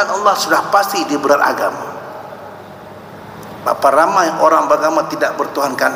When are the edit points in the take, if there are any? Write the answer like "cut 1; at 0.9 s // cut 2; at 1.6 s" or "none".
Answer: cut 1; at 1.3 s